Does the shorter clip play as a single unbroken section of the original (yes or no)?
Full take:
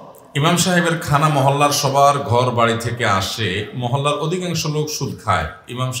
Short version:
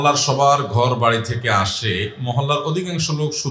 yes